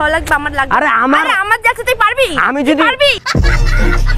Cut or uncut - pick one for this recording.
uncut